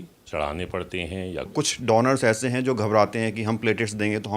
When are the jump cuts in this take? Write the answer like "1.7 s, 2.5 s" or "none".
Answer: 1.5 s